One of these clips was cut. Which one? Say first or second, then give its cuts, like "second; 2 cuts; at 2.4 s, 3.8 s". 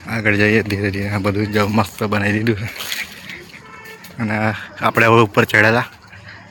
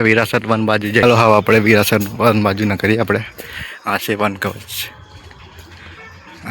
second; 1 cut; at 1.0 s